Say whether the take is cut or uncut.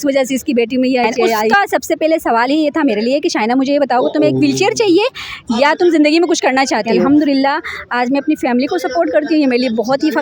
cut